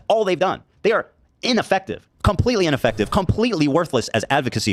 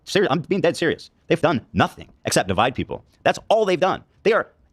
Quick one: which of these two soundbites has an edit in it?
second; 2 cuts; at 1.4 s, 2.5 s

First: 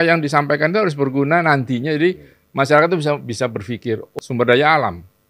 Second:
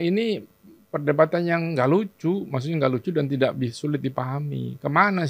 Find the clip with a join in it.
first; 1 cut; at 4.1 s

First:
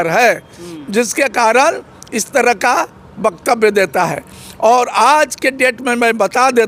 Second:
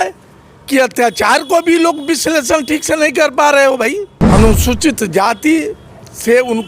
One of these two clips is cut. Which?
second; 1 cut; at 4.1 s

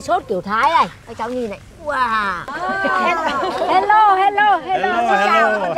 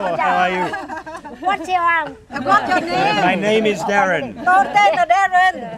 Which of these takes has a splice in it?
first; 1 cut; at 2.6 s

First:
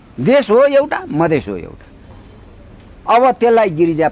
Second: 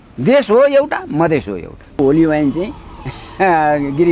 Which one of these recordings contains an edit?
second; 1 cut; at 1.9 s

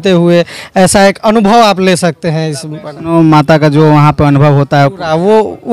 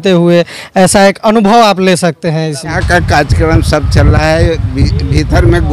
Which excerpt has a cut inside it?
second; 1 cut; at 2.8 s

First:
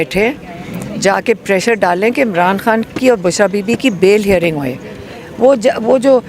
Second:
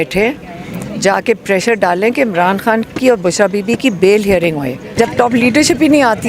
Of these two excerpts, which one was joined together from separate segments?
second; 1 cut; at 4.8 s

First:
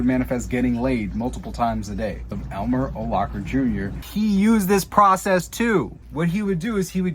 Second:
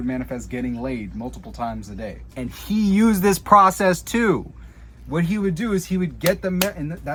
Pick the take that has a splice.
first; 3 cuts; at 2.3 s, 4.0 s, 6.0 s

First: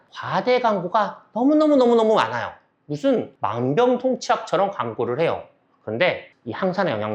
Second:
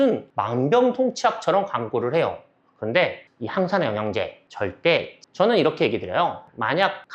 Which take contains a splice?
second; 1 cut; at 5.2 s

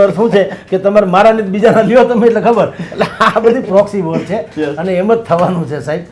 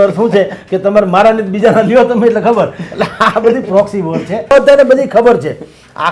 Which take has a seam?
second; 1 cut; at 4.5 s

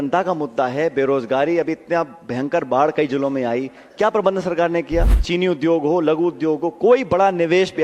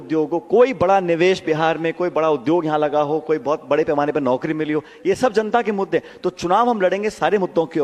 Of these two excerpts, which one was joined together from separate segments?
first; 1 cut; at 5.2 s

